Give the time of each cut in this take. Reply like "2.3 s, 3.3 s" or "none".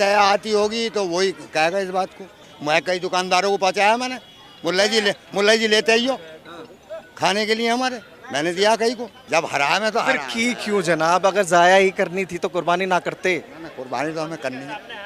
2.5 s, 9.1 s